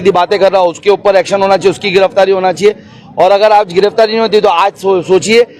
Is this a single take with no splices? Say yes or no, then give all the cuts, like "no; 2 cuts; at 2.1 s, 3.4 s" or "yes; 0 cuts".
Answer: yes; 0 cuts